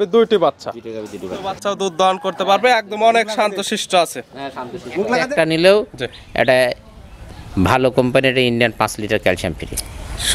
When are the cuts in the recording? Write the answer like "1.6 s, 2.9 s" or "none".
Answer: 1.5 s, 5.2 s